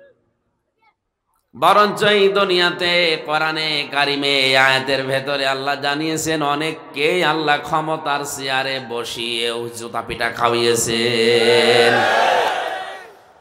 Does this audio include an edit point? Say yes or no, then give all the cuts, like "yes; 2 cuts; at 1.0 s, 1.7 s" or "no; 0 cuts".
yes; 1 cut; at 12.5 s